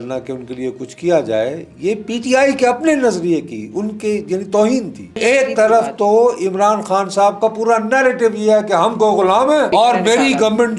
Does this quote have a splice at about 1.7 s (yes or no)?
no